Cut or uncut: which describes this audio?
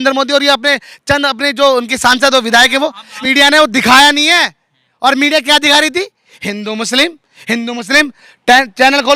cut